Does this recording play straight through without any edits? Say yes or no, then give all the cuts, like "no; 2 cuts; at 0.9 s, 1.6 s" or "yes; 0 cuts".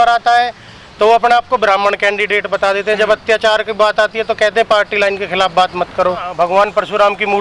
no; 1 cut; at 6.3 s